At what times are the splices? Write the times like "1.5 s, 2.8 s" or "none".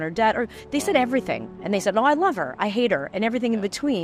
none